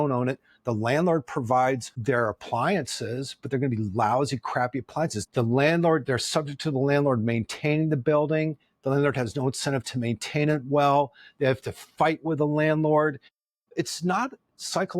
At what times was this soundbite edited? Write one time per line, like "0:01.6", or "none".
0:05.2
0:13.7